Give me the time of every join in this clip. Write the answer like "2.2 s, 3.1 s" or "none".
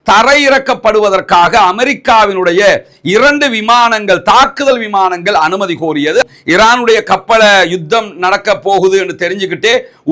6.2 s